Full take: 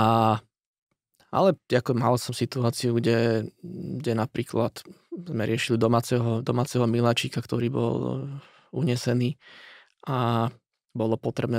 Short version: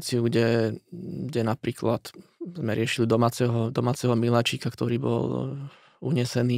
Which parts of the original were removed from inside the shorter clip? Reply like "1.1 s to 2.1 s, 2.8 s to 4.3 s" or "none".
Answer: none

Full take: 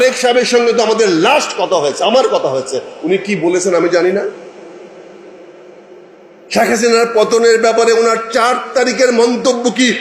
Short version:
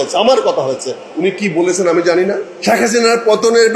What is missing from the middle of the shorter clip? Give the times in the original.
4.4 s to 6.4 s

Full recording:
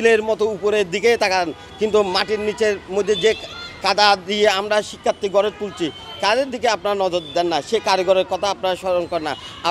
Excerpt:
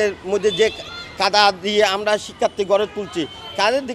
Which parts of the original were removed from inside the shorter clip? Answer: none

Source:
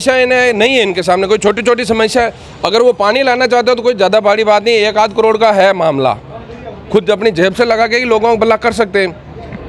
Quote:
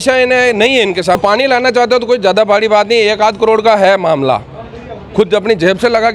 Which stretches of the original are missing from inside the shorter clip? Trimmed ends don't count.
1.2 s to 2.9 s

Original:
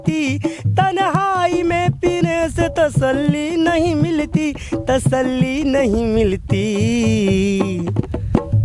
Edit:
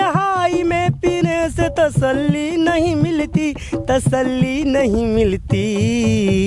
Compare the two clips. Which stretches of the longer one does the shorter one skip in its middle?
none

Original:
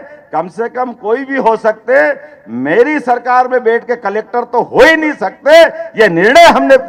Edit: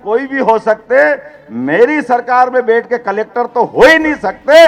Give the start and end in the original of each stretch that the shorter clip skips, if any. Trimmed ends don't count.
none

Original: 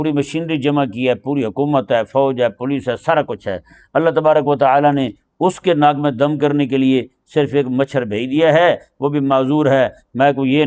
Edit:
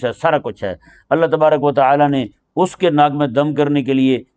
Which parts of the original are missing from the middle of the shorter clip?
none

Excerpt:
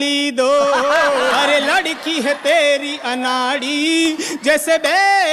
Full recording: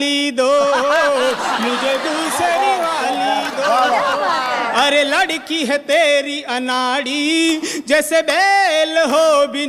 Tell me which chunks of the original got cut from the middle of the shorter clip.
1.4 s to 4.8 s

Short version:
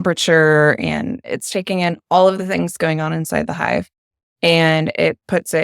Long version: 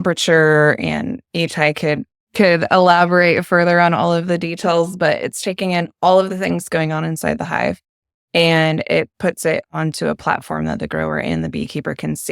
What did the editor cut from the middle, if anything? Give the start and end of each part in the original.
1.3 s to 5.2 s

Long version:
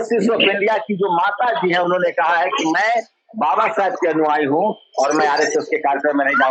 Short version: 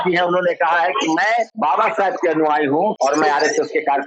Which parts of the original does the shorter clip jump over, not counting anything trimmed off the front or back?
3.1 s to 3.3 s, 4.7 s to 4.9 s

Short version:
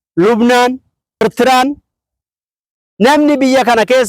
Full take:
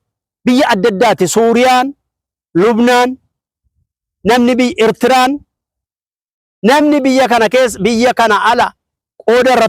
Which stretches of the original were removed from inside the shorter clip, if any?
3.6 s to 4.9 s

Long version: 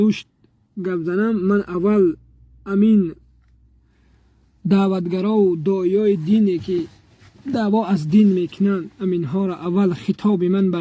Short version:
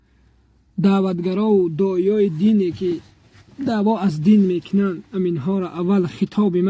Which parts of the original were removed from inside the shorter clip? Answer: none

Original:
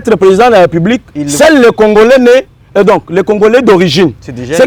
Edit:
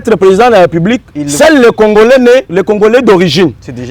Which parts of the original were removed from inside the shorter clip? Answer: 2.5 s to 3.1 s

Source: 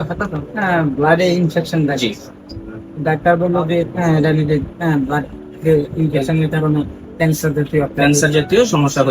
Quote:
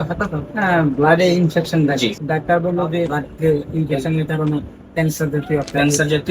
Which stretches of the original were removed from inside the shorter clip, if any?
2.2 s to 3.0 s, 3.9 s to 5.4 s

